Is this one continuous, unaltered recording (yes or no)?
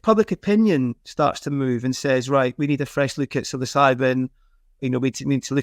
yes